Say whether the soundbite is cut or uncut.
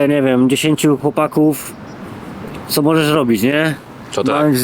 cut